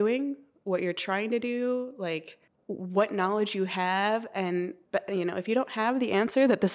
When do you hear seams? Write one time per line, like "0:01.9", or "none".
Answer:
none